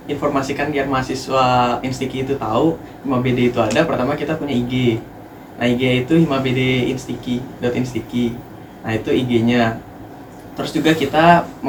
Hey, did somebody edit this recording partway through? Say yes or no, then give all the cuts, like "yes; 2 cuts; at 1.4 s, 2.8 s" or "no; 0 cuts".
no; 0 cuts